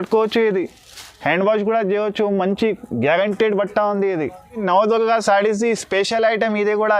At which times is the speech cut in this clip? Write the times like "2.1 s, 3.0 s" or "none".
4.6 s